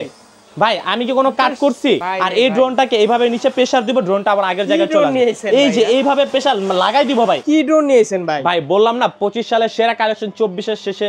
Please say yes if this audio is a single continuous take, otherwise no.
no